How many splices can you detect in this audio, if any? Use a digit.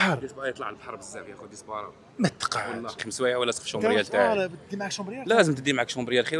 1